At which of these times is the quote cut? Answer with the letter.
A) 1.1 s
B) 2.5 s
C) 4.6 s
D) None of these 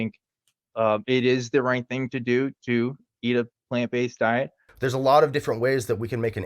C